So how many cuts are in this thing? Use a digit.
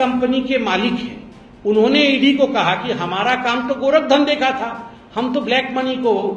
0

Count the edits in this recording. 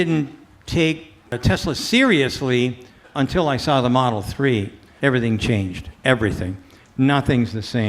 3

